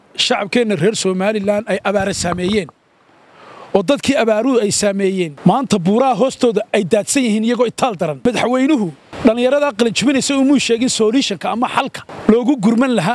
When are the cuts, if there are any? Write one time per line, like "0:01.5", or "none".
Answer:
0:05.3
0:08.2
0:09.0
0:12.0